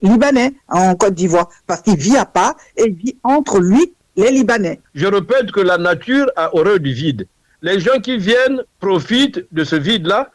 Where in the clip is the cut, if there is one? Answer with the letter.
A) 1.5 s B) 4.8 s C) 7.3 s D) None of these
B